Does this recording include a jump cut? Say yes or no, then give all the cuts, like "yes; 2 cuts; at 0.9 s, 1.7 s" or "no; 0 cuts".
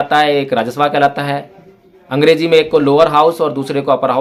no; 0 cuts